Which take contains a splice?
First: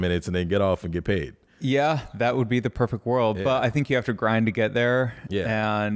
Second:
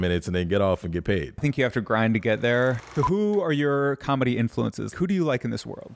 second; 3 cuts; at 1.4 s, 2.8 s, 4.9 s

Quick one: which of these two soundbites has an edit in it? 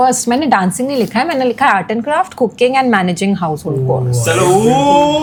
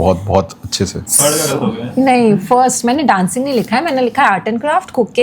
second; 1 cut; at 1.0 s

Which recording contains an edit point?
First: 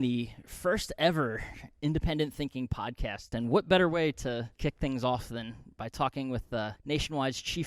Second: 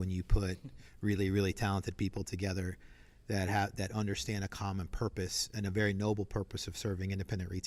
first; 3 cuts; at 3.3 s, 4.5 s, 6.8 s

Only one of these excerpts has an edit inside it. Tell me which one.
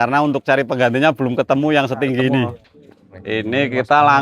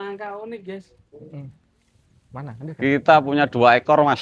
first; 1 cut; at 2.7 s

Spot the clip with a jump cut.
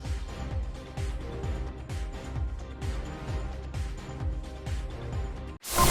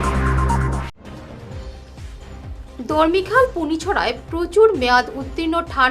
second; 1 cut; at 0.9 s

